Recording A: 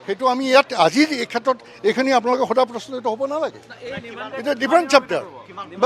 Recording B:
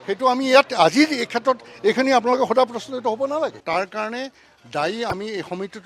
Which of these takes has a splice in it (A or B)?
B